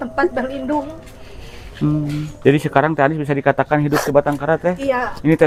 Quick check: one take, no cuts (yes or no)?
yes